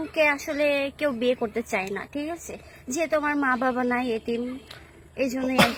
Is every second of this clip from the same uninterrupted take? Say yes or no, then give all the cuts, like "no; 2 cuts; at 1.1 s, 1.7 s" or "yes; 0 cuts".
yes; 0 cuts